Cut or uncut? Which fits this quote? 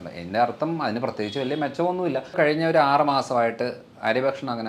cut